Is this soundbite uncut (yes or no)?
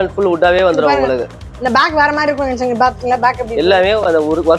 yes